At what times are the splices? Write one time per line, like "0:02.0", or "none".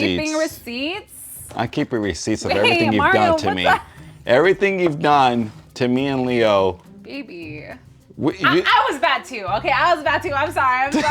0:06.8